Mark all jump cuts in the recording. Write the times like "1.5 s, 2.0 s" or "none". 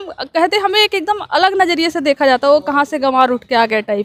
none